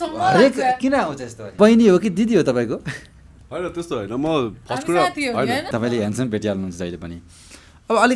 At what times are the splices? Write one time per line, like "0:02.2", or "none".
0:01.5
0:05.7